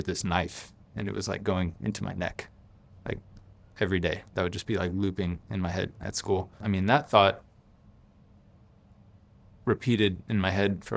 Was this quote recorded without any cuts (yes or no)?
no